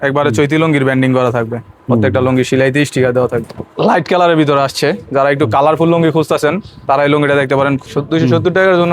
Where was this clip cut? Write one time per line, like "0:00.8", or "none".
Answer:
0:03.6
0:07.9